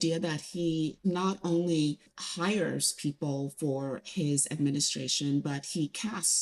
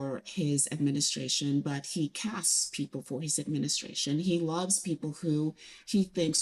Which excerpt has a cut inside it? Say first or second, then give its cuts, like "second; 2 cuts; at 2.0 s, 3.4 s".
first; 2 cuts; at 1.0 s, 2.2 s